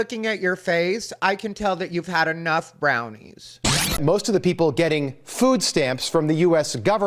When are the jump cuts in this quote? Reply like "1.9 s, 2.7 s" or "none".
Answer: 4.0 s